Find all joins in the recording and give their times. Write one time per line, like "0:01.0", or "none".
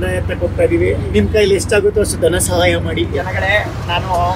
0:01.1
0:03.2